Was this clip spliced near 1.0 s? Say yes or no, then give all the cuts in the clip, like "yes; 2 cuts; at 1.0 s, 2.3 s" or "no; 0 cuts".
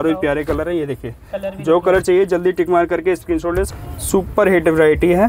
no; 1 cut; at 3.7 s